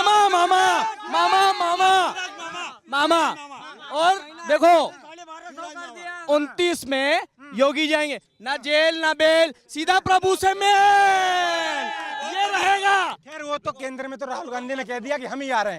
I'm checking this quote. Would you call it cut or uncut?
uncut